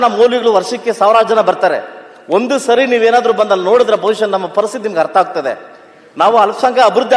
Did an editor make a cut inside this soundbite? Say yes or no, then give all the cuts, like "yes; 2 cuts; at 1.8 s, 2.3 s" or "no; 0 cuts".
no; 0 cuts